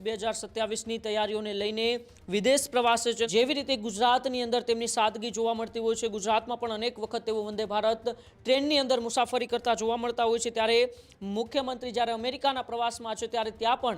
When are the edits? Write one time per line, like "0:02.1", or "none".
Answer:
0:03.3